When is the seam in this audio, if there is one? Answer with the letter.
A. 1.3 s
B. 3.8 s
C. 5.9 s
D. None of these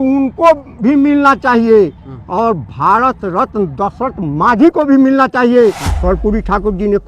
C